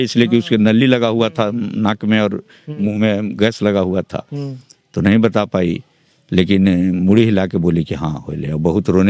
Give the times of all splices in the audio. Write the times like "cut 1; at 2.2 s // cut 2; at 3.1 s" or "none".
none